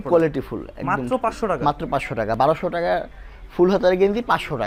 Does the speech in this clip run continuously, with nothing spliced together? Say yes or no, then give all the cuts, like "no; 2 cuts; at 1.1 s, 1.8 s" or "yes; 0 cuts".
yes; 0 cuts